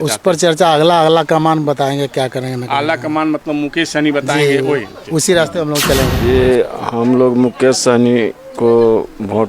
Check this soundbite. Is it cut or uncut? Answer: cut